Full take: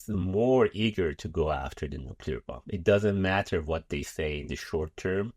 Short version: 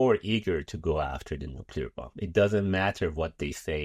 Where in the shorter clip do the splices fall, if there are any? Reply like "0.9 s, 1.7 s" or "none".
none